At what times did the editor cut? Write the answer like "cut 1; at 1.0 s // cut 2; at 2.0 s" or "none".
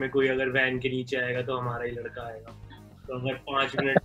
none